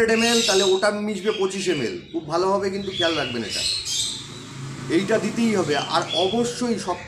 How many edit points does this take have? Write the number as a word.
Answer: zero